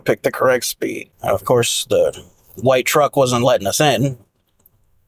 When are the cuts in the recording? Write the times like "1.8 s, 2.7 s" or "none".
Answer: 1.1 s